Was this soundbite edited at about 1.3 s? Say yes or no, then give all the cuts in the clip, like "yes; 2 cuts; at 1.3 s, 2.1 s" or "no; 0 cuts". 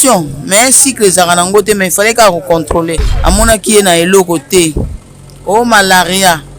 no; 1 cut; at 3.1 s